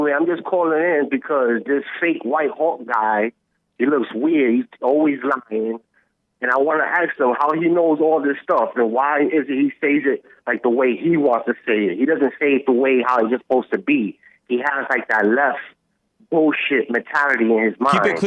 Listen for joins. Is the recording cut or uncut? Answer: uncut